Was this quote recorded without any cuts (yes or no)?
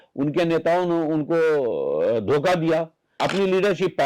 no